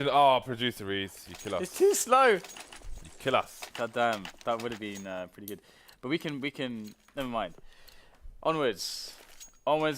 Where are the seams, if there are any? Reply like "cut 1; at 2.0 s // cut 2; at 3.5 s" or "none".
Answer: cut 1; at 8.0 s